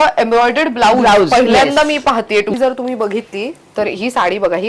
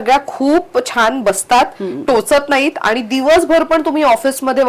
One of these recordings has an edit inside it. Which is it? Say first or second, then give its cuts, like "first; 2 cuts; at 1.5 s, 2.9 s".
first; 1 cut; at 2.5 s